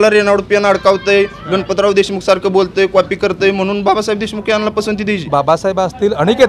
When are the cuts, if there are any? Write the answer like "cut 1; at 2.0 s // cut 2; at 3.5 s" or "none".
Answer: cut 1; at 5.2 s